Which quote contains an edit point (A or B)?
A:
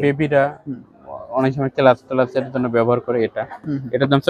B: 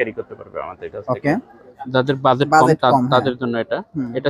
B